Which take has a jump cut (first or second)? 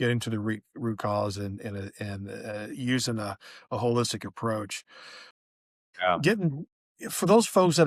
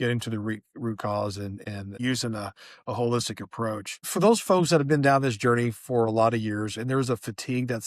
second